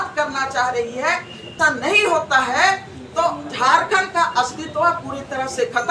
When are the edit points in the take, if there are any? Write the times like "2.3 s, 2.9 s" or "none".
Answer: 1.5 s